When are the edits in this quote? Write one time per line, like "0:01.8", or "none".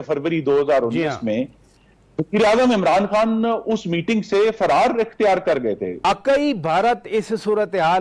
0:06.1